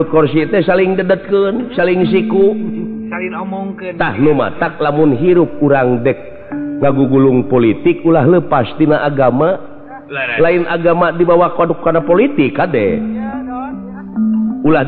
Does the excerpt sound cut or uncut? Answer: uncut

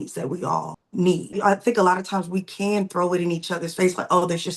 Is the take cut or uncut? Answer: cut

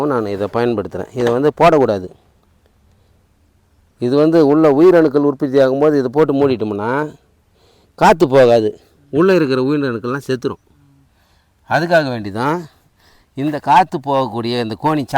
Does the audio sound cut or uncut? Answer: uncut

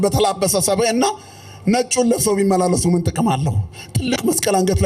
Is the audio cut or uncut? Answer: uncut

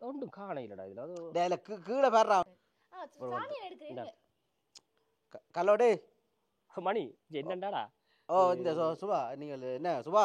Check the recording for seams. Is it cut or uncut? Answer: cut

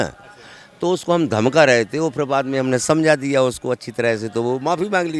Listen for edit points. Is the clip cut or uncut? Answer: uncut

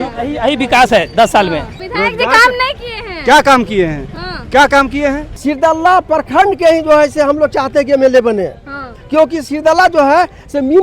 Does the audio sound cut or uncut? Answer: cut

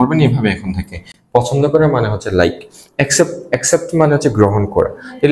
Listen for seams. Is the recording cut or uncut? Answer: uncut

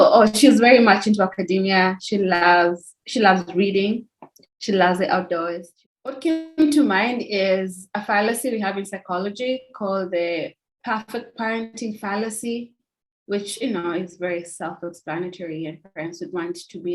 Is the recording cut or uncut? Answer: cut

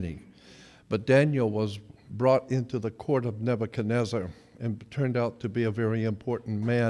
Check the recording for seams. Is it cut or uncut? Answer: uncut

